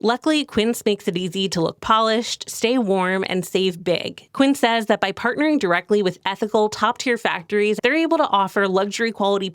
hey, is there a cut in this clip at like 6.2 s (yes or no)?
no